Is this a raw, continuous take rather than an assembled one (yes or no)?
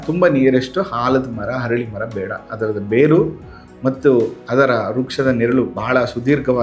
yes